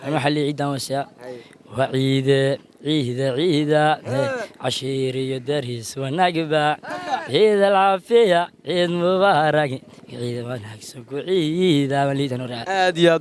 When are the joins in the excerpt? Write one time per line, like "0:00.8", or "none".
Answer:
none